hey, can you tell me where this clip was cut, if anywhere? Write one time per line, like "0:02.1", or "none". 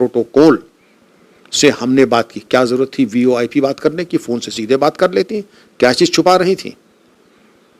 none